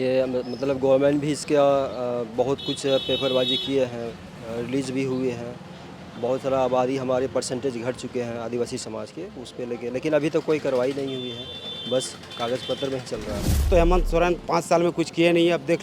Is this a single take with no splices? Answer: no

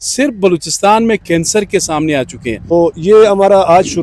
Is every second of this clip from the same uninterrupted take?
no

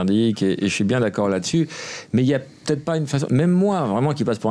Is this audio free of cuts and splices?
yes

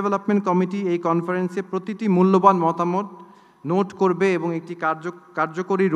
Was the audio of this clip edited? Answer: no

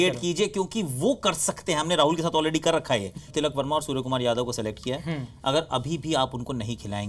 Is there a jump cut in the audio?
yes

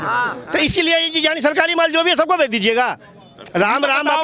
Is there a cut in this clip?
no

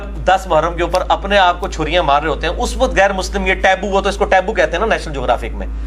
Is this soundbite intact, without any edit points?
yes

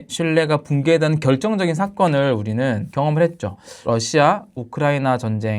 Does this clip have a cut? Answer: yes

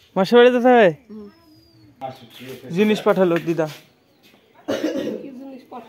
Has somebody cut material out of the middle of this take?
yes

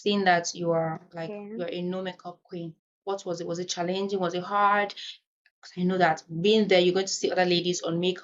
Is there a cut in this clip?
no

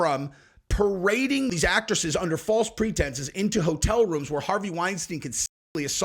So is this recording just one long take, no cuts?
no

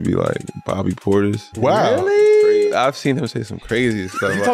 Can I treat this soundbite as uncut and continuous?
no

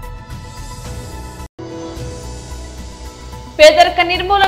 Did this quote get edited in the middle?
yes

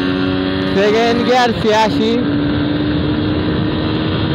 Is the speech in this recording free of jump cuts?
yes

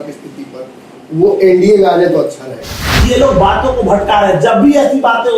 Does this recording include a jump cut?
yes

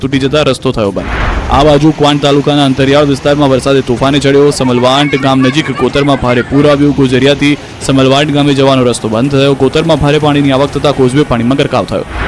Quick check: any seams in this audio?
no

